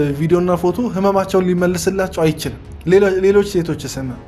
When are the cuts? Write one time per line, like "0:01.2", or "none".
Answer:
0:02.6